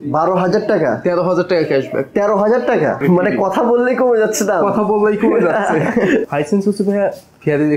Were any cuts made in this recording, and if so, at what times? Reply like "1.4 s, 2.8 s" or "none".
3.0 s, 6.2 s